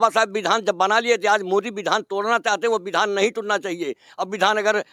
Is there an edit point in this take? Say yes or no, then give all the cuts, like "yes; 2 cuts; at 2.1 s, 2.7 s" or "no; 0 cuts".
no; 0 cuts